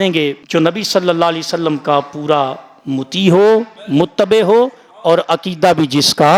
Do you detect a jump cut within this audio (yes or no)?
no